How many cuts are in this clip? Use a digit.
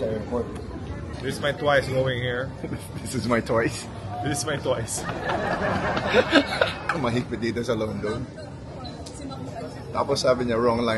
2